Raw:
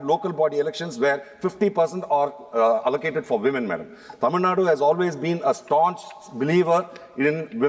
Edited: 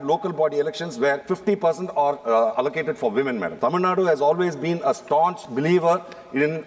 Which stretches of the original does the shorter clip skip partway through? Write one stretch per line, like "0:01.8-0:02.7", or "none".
0:01.2-0:01.4
0:02.3-0:02.5
0:03.8-0:04.1
0:06.0-0:06.3